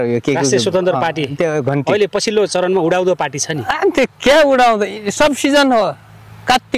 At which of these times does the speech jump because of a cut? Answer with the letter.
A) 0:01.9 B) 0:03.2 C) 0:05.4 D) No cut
D